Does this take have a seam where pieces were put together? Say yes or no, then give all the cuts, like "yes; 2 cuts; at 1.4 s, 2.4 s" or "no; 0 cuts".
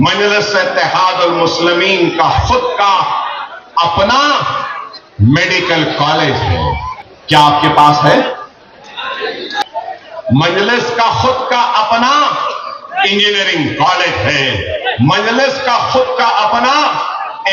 no; 0 cuts